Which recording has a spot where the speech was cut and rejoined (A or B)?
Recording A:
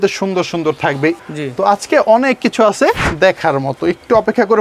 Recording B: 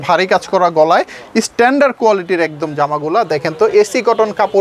A